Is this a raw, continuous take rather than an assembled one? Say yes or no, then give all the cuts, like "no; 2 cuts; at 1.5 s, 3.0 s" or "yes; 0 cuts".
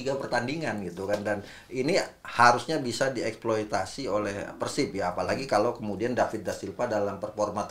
yes; 0 cuts